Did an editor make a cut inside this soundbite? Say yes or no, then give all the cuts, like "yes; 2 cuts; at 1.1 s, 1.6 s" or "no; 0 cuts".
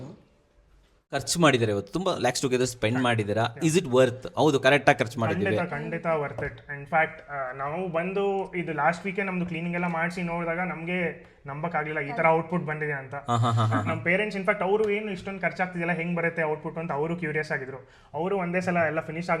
yes; 1 cut; at 1.3 s